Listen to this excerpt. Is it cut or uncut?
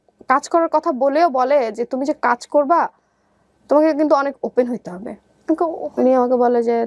cut